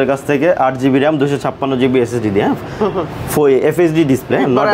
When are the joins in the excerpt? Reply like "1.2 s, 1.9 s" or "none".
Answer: none